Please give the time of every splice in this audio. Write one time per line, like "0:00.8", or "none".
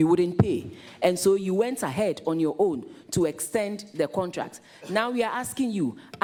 none